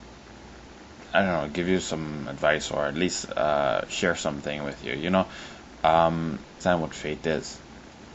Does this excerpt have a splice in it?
no; 0 cuts

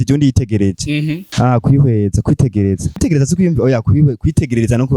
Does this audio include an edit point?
yes; 2 cuts; at 1.3 s, 3.0 s

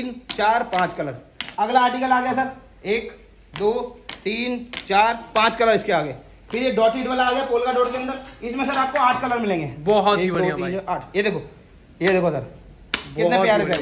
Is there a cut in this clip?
no; 0 cuts

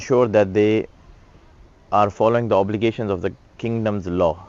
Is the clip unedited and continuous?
yes; 0 cuts

